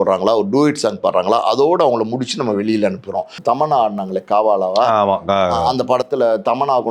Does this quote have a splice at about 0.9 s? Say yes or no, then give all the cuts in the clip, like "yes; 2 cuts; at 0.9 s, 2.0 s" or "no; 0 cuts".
no; 1 cut; at 3.4 s